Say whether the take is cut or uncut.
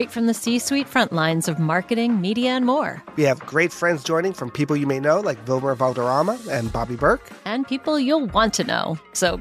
uncut